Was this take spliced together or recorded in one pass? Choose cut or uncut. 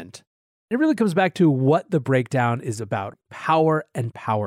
cut